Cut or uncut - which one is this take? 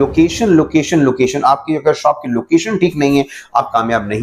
uncut